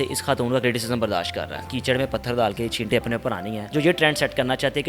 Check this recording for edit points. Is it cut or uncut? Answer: cut